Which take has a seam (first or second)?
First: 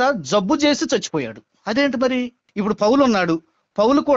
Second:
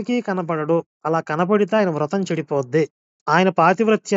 first